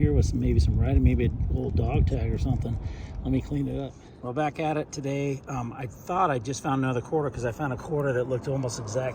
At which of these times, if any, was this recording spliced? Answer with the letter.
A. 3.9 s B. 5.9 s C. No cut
A